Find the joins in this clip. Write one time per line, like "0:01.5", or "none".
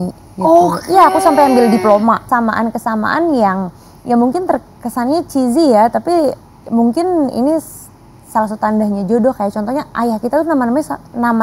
0:02.2